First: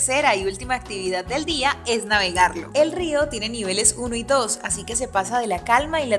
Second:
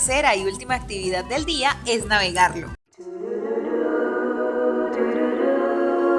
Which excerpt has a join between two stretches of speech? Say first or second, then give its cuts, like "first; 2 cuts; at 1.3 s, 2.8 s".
first; 1 cut; at 2.6 s